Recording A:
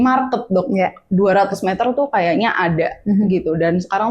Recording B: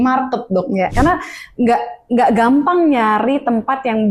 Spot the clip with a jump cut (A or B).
B